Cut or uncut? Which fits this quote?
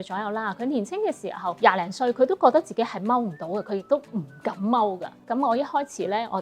cut